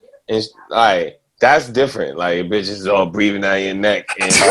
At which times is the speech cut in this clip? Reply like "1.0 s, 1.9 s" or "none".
none